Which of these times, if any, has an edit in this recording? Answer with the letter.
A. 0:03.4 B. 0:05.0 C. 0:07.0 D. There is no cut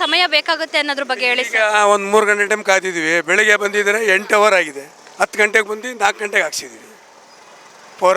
D